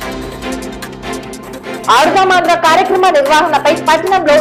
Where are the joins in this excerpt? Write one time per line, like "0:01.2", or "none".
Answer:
none